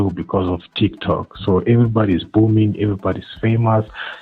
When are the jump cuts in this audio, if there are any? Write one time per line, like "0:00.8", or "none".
none

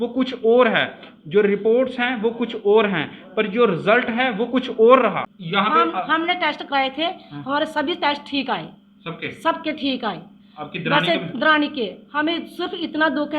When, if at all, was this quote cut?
0:05.3

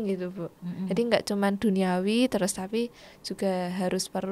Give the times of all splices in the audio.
none

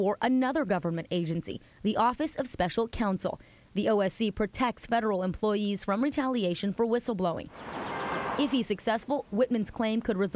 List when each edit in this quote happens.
none

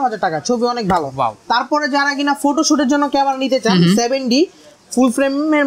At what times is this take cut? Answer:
none

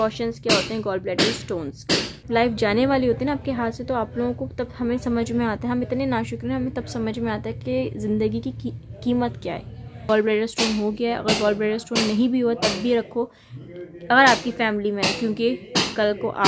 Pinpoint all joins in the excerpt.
0:02.2
0:10.1

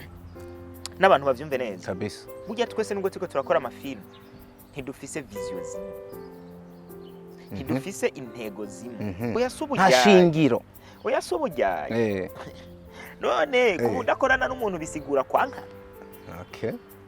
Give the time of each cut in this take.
0:09.3

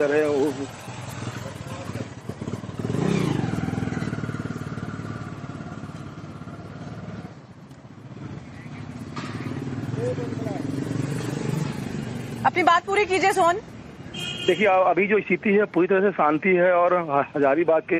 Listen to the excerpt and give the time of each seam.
none

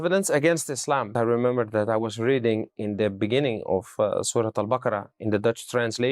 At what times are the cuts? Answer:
0:01.1

